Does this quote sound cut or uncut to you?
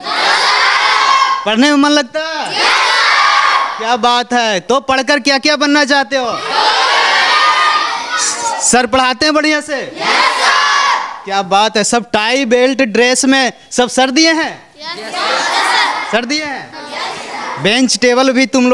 uncut